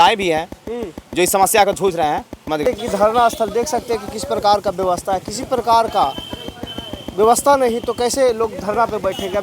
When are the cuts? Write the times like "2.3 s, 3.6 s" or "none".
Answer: 2.6 s

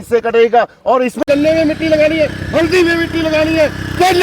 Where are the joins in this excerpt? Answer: 1.2 s

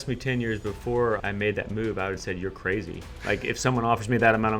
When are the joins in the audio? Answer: 1.2 s

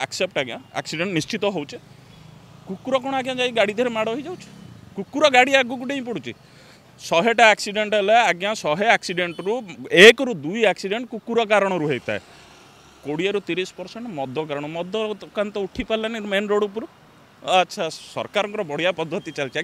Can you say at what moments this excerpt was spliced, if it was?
none

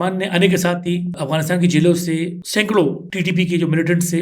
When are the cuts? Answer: 1.2 s, 2.4 s, 3.1 s

